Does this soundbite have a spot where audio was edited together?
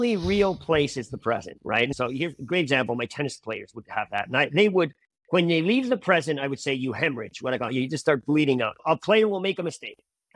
yes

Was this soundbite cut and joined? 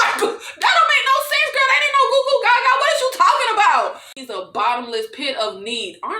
yes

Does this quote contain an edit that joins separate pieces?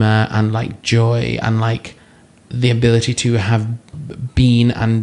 no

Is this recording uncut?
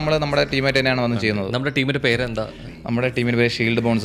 yes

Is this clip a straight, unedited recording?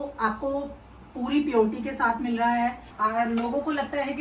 no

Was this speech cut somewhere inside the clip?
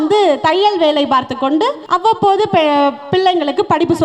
yes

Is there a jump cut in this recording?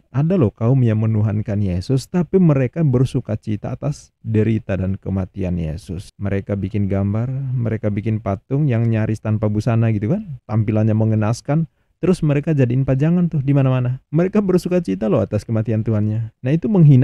no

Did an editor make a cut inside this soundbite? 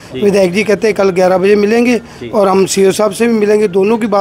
no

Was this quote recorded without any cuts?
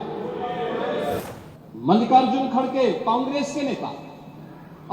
no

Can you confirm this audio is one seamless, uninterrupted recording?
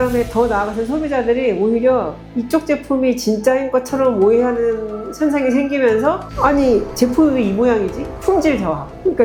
yes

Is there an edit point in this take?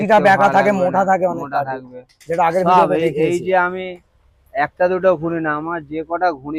no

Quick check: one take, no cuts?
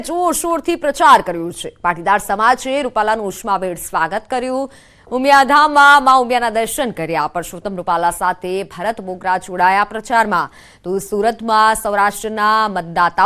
no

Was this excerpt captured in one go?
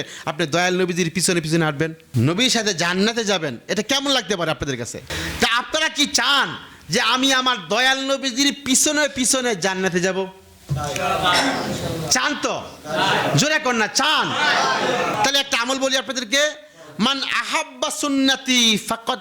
no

